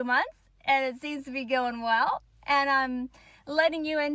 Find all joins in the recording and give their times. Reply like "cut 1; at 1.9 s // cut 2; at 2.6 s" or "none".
cut 1; at 3.0 s